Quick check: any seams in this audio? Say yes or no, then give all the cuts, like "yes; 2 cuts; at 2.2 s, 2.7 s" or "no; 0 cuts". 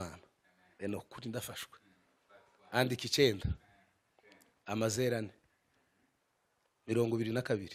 no; 0 cuts